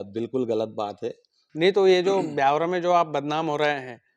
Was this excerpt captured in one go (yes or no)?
no